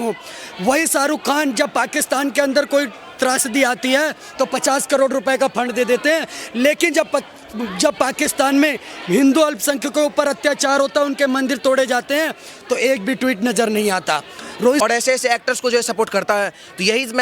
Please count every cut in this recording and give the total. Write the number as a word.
one